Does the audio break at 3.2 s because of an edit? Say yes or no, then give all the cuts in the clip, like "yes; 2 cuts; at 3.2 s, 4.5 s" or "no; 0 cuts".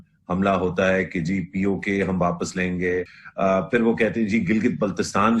yes; 1 cut; at 3.2 s